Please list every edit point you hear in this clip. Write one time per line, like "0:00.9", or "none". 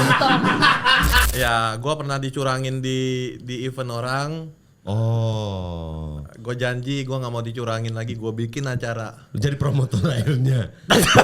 0:01.2